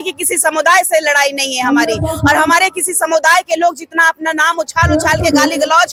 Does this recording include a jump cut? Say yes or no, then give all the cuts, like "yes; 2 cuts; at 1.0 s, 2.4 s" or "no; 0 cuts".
no; 0 cuts